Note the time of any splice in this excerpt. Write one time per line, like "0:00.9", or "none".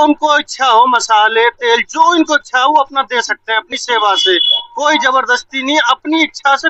none